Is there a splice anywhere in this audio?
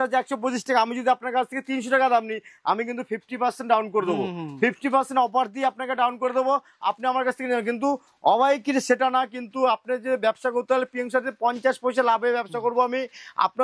no; 0 cuts

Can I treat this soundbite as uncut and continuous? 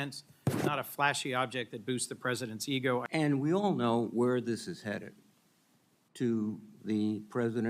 no; 1 cut; at 3.0 s

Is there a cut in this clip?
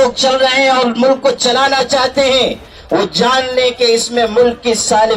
no; 0 cuts

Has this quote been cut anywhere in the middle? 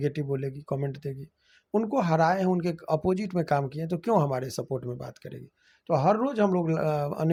no; 0 cuts

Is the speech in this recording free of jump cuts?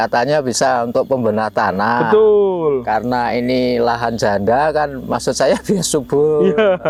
yes; 0 cuts

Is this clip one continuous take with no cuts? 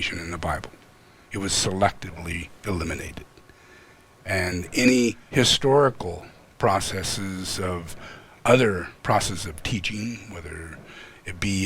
no; 2 cuts; at 5.2 s, 8.9 s

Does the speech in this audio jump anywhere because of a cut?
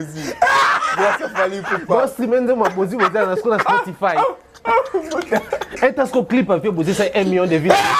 no; 0 cuts

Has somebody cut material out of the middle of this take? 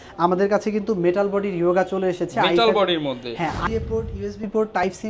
yes; 1 cut; at 3.6 s

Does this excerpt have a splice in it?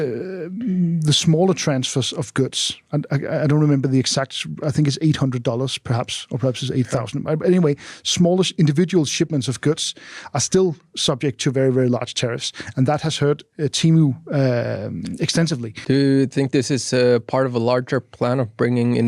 yes; 1 cut; at 15.7 s

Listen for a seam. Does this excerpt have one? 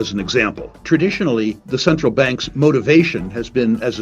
yes; 2 cuts; at 0.8 s, 1.7 s

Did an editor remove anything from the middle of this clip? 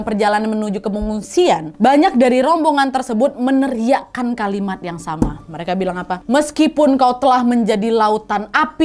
yes; 1 cut; at 6.2 s

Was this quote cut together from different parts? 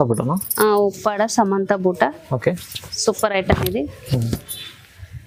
no; 0 cuts

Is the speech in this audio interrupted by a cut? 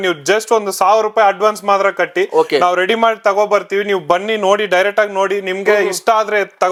no; 0 cuts

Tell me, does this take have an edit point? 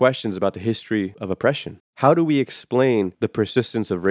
yes; 2 cuts; at 1.6 s, 3.1 s

